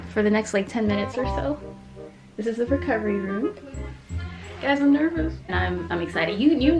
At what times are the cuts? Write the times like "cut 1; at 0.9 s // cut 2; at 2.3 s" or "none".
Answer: cut 1; at 5.5 s

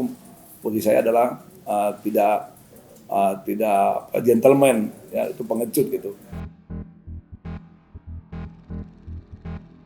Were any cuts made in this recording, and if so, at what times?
cut 1; at 6.5 s

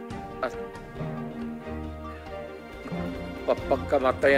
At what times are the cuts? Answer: cut 1; at 3.5 s

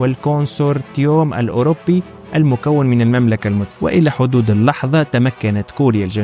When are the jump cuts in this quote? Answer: cut 1; at 3.7 s

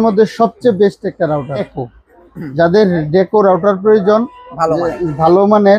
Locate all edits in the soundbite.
cut 1; at 1.8 s

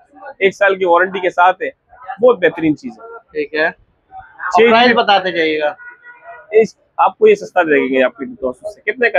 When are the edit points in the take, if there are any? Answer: none

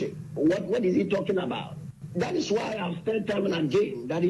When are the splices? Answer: none

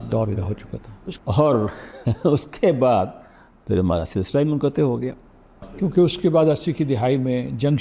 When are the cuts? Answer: none

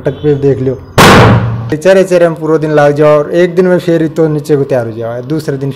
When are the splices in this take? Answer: cut 1; at 1.8 s

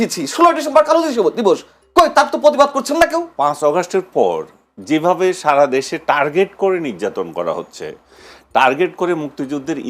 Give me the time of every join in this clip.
cut 1; at 3.3 s

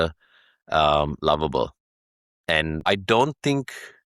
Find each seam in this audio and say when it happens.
cut 1; at 2.8 s

